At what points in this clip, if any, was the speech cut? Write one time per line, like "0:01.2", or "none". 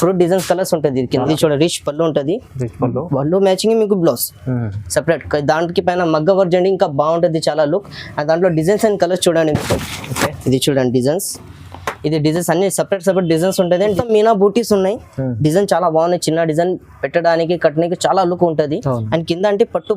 0:01.2
0:14.0